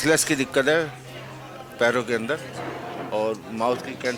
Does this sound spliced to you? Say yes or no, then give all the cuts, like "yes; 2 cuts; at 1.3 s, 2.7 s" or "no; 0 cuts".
no; 0 cuts